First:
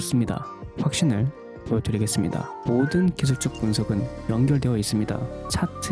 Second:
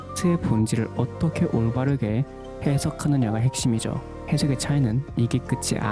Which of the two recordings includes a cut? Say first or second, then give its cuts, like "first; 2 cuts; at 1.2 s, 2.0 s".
first; 1 cut; at 2.5 s